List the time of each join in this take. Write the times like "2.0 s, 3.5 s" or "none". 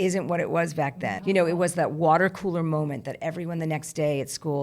1.1 s